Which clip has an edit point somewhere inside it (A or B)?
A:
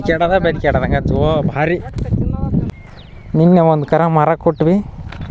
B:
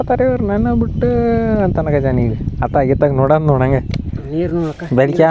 A